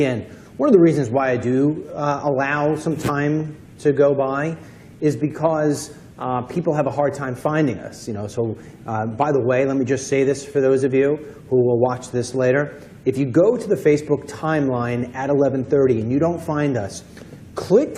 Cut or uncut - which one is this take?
uncut